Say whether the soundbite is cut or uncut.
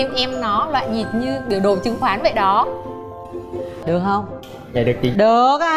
cut